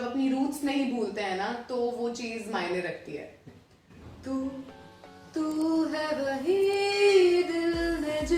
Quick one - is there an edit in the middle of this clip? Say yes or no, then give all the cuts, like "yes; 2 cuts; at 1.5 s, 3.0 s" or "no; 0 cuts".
yes; 1 cut; at 3.4 s